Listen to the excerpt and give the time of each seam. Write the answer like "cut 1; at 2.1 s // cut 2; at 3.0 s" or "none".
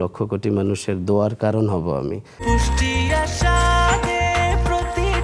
none